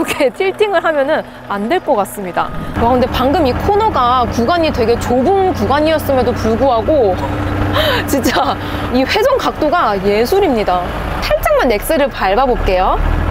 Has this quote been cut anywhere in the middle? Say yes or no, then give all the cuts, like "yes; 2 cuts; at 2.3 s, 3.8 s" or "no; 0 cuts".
yes; 1 cut; at 2.7 s